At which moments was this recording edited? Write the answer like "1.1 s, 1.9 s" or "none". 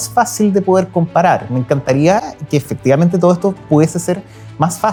none